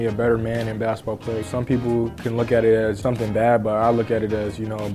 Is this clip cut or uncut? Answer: cut